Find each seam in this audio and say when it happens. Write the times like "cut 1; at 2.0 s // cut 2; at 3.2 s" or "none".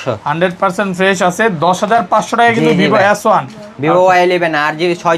none